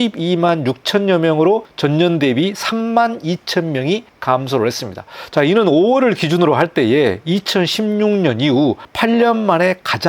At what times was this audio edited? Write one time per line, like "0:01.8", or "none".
0:01.7
0:04.1
0:08.9